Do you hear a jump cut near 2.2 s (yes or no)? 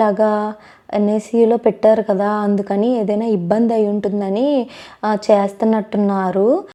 no